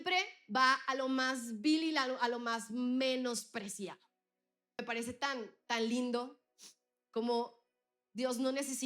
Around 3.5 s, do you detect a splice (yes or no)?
no